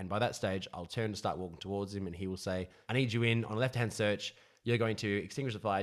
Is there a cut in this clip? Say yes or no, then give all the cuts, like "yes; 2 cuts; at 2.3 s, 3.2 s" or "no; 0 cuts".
yes; 1 cut; at 2.8 s